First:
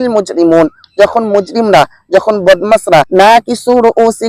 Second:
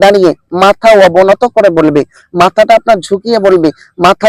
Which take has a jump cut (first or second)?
first